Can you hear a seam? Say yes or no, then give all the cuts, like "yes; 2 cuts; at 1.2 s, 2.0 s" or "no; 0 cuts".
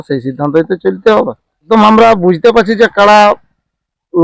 yes; 1 cut; at 1.6 s